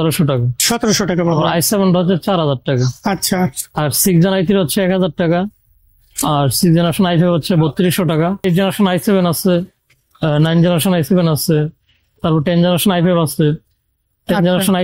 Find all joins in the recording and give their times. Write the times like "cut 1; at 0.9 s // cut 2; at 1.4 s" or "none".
cut 1; at 8.4 s